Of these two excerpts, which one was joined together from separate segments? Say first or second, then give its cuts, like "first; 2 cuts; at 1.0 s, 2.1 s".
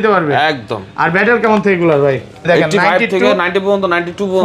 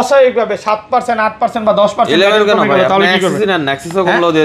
first; 1 cut; at 2.4 s